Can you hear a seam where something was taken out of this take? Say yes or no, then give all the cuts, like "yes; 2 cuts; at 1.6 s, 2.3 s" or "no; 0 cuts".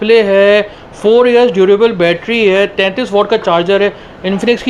no; 0 cuts